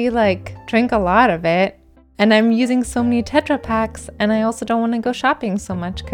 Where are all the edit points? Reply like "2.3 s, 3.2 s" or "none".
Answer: 1.9 s